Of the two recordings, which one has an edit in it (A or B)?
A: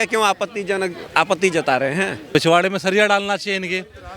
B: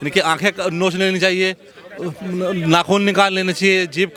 A